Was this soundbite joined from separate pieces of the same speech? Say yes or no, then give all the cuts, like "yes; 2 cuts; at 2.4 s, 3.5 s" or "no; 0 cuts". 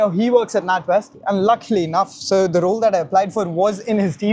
yes; 1 cut; at 1.1 s